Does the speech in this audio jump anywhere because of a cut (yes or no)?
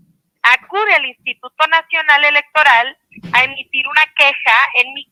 no